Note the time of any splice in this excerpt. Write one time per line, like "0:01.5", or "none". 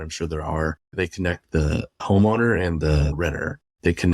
0:00.9
0:02.0
0:03.1